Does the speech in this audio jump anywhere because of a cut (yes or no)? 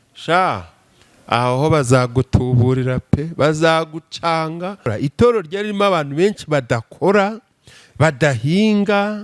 yes